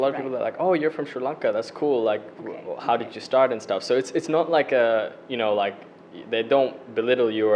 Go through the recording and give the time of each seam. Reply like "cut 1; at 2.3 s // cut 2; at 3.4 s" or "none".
none